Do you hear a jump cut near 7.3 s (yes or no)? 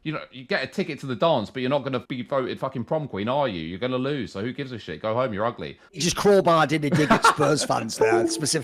no